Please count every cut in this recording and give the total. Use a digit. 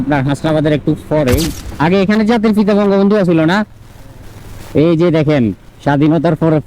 1